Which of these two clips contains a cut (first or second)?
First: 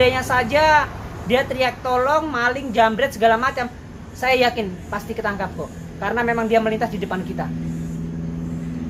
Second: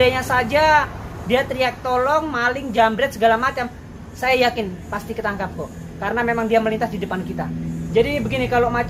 second